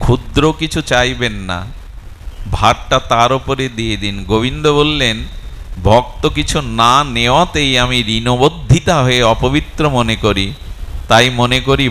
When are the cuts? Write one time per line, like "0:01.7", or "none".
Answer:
none